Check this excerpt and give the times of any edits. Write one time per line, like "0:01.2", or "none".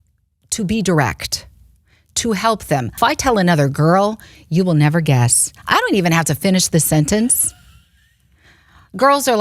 0:03.0

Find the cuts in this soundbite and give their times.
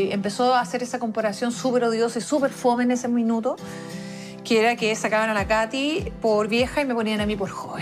none

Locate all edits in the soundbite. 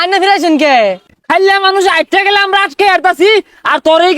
0:01.1

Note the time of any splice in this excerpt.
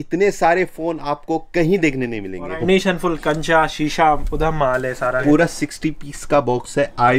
0:02.6
0:05.2

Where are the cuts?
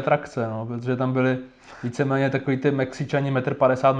none

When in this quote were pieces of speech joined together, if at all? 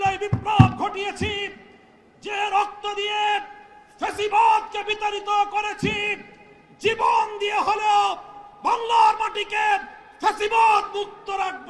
none

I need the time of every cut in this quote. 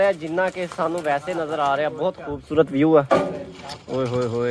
none

